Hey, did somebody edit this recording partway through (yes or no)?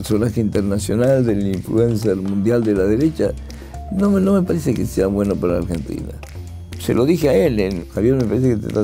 no